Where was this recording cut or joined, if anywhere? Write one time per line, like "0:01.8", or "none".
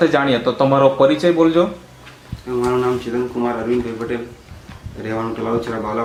none